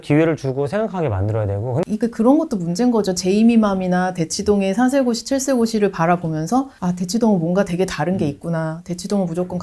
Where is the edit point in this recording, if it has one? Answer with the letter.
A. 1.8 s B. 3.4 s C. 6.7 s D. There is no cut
A